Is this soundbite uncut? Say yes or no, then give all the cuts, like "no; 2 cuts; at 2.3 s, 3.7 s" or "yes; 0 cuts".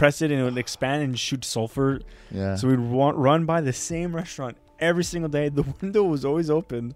yes; 0 cuts